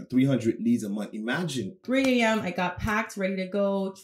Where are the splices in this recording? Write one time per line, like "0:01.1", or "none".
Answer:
0:01.8